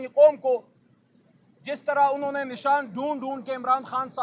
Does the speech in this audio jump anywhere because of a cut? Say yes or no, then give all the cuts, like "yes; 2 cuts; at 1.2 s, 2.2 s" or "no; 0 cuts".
no; 0 cuts